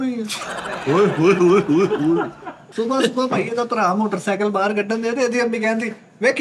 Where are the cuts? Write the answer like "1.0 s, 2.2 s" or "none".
2.6 s

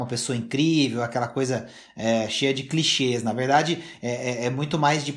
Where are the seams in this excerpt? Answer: none

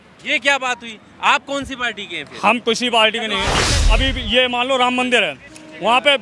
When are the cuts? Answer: 3.7 s

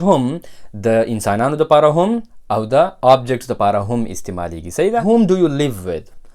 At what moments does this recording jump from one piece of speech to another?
5.0 s

